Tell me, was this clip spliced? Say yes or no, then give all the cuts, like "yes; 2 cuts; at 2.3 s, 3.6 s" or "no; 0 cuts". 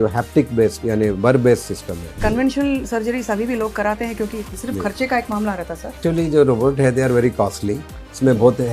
yes; 3 cuts; at 2.1 s, 4.5 s, 6.0 s